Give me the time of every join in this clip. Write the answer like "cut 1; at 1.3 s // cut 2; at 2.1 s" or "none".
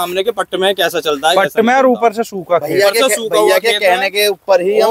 none